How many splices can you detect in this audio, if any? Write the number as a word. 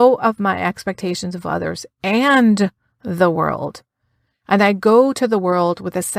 zero